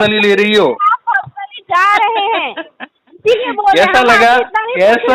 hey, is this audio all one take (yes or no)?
yes